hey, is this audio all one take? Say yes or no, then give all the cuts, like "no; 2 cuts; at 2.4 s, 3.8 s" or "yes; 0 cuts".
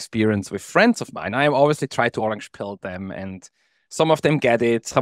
yes; 0 cuts